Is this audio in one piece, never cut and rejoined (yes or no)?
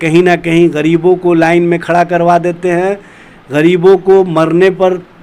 yes